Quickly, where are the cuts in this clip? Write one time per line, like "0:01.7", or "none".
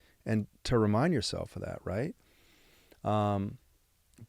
none